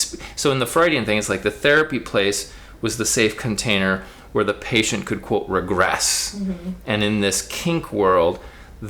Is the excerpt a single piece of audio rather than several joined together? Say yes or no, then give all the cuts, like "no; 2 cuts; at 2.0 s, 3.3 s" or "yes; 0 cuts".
yes; 0 cuts